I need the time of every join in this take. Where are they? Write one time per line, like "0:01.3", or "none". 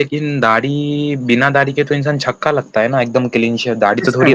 none

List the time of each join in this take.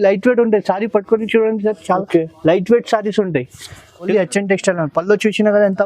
0:04.1

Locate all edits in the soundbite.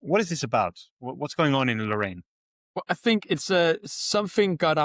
none

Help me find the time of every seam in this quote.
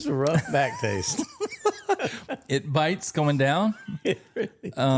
none

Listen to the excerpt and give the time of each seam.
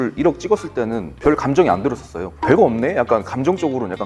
0:01.1
0:02.3

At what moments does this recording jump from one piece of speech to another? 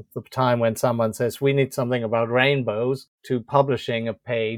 0:03.1

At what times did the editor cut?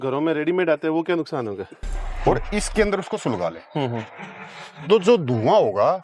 0:01.9

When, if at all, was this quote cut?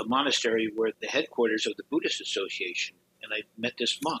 0:01.0
0:03.1

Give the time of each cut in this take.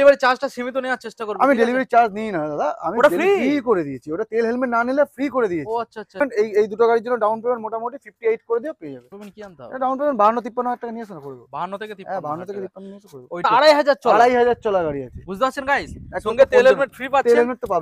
0:06.2
0:09.2
0:13.4

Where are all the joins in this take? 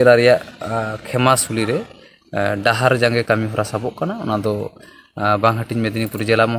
none

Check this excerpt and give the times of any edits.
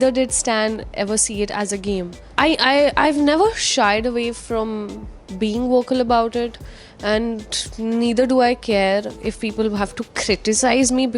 0:02.2

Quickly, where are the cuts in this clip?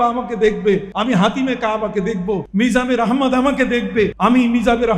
0:00.9
0:02.5
0:04.1

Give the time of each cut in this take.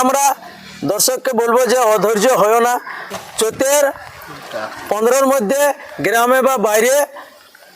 0:03.3

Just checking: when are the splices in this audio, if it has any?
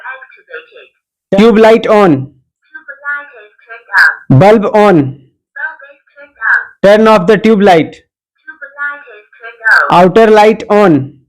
0:01.4

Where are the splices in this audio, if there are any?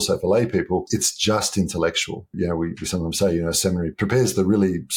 0:00.8
0:02.3
0:03.9

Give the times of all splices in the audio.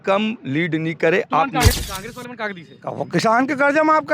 0:01.8

